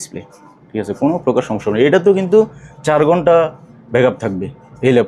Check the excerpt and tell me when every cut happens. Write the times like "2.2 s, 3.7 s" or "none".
none